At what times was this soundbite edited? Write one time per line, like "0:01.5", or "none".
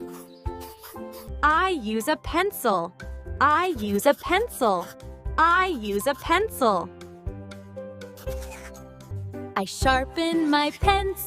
0:01.3